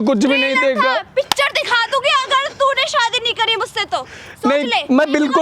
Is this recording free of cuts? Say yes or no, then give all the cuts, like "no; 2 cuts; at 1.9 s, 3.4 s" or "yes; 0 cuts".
yes; 0 cuts